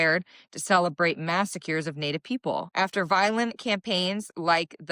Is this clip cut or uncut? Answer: cut